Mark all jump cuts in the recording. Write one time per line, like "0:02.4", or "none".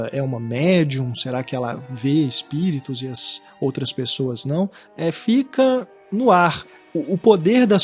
0:04.8
0:06.0
0:06.6